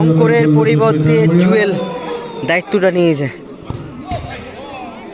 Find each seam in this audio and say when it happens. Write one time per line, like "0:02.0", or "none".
none